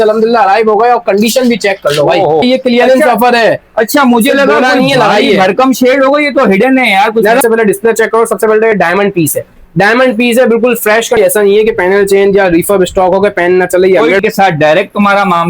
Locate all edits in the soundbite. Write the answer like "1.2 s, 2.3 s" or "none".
2.4 s, 7.4 s, 11.2 s, 14.2 s